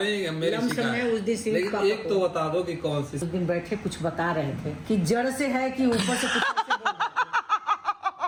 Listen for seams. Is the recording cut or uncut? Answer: uncut